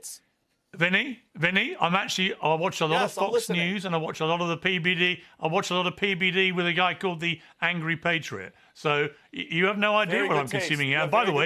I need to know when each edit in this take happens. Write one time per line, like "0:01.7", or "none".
none